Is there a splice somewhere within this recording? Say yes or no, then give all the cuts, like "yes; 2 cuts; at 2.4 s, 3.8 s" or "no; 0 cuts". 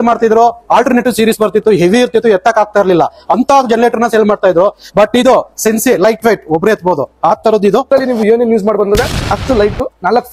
yes; 1 cut; at 7.9 s